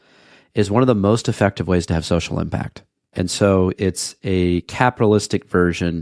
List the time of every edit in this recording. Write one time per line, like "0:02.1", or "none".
0:03.1